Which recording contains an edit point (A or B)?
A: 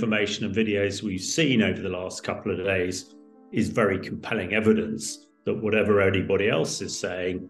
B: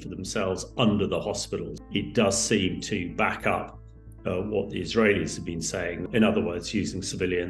B